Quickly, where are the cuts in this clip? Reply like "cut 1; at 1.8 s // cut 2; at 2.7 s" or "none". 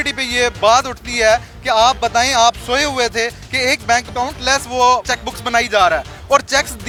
none